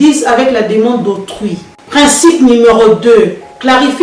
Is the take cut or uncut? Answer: uncut